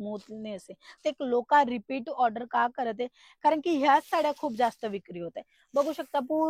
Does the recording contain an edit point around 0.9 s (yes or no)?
yes